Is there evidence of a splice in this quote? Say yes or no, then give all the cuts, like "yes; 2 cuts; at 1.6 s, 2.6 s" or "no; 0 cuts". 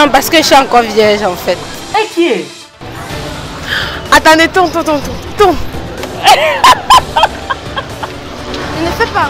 no; 0 cuts